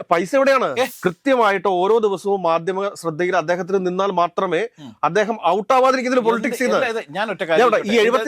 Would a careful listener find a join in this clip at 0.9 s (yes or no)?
yes